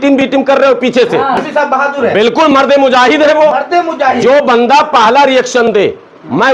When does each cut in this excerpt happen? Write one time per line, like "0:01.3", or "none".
0:01.4